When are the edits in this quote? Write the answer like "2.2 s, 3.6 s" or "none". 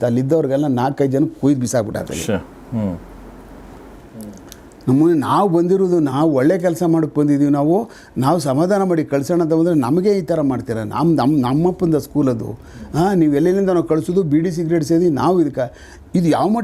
none